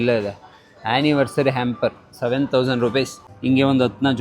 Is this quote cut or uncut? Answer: cut